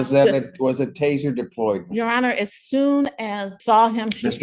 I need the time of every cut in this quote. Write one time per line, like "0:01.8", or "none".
0:03.5

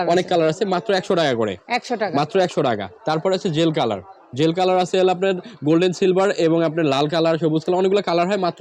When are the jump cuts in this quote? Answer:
none

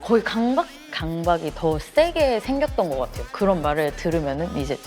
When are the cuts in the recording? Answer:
0:01.0

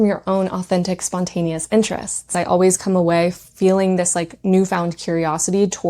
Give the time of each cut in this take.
0:02.3

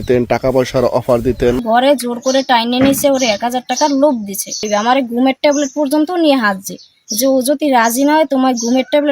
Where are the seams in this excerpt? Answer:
0:01.6
0:04.9

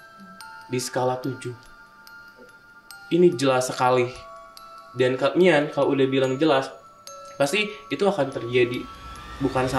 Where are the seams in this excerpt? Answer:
none

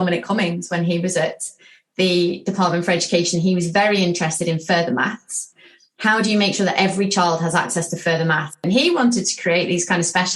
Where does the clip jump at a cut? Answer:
0:08.6

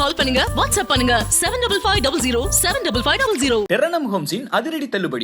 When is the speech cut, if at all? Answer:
0:03.7

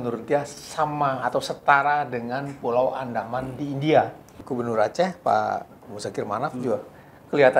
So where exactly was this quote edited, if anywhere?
0:04.3

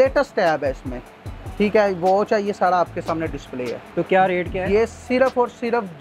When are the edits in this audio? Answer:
none

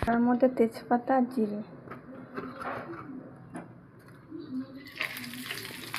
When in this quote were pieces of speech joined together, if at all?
none

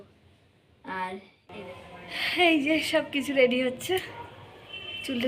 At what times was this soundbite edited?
0:01.4

